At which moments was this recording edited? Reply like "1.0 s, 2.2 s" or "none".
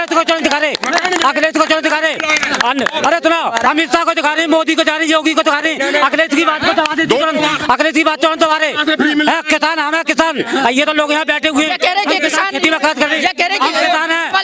none